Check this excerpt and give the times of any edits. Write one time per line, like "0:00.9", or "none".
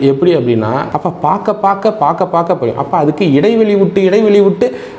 0:00.9